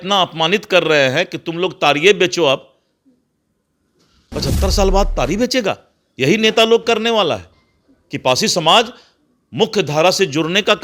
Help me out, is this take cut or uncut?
uncut